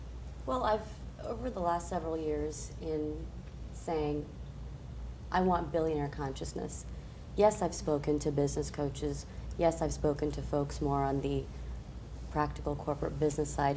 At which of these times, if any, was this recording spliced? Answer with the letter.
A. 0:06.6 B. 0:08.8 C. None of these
B